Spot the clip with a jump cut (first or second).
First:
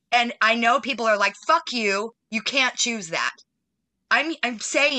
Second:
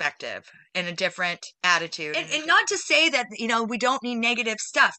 second